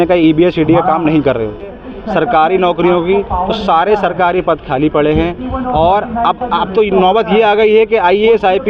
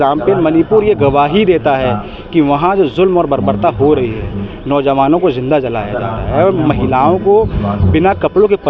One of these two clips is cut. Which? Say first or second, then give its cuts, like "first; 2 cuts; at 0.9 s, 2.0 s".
first; 1 cut; at 1.9 s